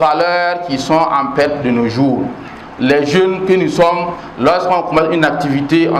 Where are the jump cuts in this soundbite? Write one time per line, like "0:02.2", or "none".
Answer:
none